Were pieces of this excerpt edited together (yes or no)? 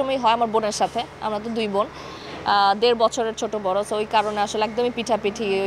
no